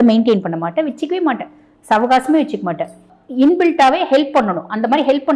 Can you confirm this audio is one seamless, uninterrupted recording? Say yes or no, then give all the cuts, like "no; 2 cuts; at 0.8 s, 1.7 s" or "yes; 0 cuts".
no; 1 cut; at 3.1 s